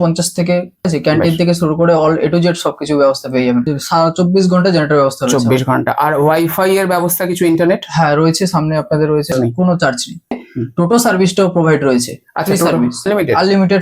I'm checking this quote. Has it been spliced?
yes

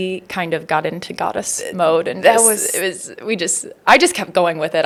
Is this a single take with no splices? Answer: yes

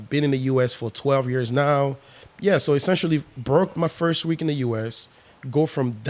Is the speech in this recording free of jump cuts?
no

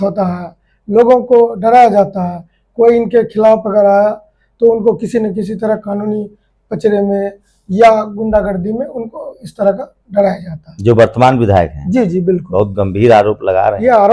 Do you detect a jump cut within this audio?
no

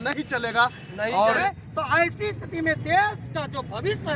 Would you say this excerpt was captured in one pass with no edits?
no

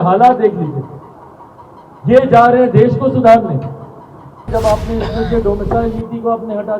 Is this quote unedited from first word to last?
no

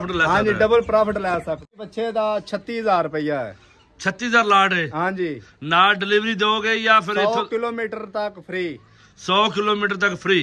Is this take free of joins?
no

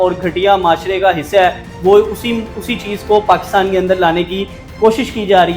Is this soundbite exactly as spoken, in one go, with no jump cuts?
yes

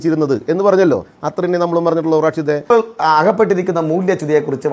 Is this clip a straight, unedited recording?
no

